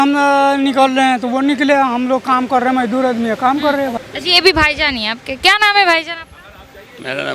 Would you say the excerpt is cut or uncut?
cut